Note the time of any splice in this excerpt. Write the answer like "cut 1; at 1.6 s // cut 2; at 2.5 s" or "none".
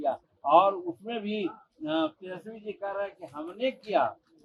none